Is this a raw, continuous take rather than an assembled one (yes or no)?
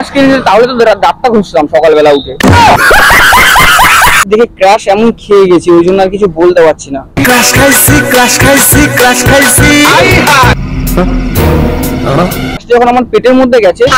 no